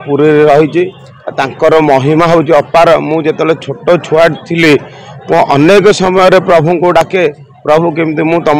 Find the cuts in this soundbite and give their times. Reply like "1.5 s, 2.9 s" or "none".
none